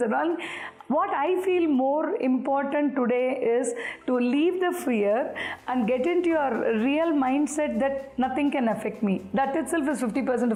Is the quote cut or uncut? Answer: uncut